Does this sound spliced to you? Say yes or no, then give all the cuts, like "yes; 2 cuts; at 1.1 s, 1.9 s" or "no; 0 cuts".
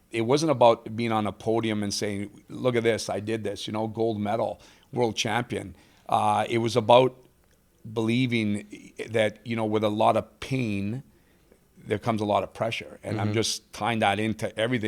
no; 0 cuts